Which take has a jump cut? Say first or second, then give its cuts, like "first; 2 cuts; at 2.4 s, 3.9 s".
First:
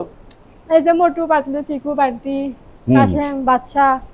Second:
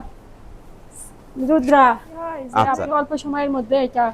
second; 1 cut; at 2.4 s